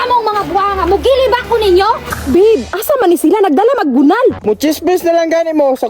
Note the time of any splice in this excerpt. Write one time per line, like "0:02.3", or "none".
0:02.1
0:04.4